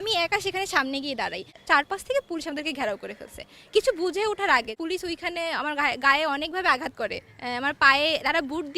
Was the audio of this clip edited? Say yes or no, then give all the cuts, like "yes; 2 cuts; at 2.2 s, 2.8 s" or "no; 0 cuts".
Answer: yes; 2 cuts; at 1.6 s, 4.7 s